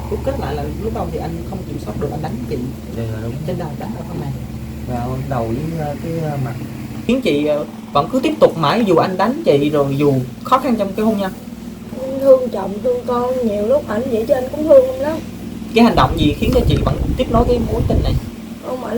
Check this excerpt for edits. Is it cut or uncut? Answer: cut